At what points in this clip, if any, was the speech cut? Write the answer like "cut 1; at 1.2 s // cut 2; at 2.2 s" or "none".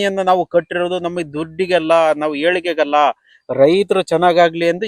none